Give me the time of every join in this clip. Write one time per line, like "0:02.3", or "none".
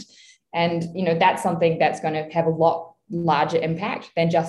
none